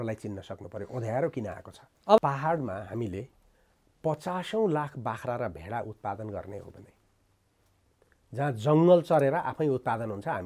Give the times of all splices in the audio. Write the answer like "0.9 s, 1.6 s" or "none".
2.2 s